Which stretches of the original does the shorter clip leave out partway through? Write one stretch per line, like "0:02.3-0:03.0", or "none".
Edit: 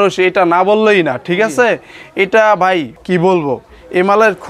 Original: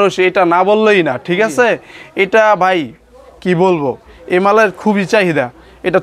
0:03.0-0:03.3